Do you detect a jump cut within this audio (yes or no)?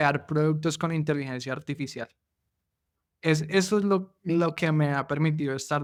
no